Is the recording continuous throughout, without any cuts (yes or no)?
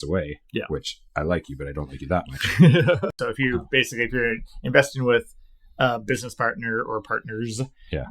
no